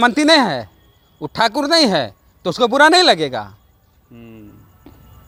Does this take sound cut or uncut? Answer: uncut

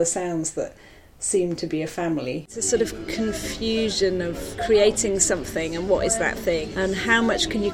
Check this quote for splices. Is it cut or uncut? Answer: cut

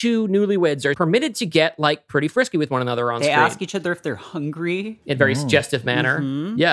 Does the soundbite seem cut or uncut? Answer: cut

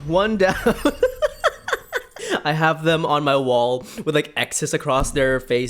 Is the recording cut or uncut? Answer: cut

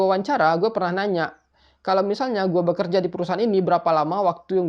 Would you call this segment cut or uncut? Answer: uncut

